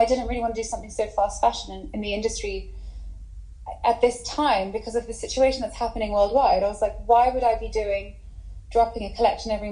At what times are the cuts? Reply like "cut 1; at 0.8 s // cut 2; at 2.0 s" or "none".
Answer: none

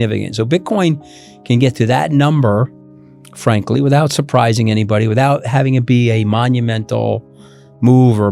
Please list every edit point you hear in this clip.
none

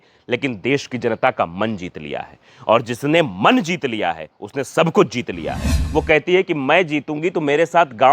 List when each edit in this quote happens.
cut 1; at 5.7 s

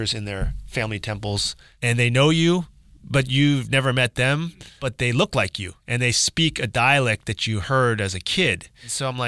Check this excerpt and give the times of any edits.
cut 1; at 4.9 s // cut 2; at 5.8 s

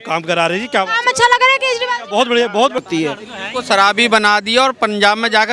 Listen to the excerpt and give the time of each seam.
cut 1; at 2.8 s

